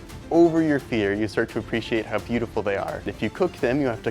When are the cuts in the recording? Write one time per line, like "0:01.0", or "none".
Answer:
0:03.1